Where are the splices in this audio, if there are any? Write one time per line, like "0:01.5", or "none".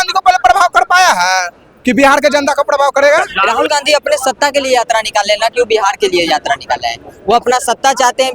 0:03.3